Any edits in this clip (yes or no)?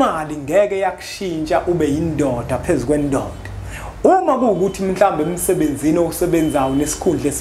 no